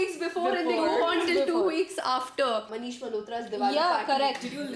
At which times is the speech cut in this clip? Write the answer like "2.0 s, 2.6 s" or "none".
2.7 s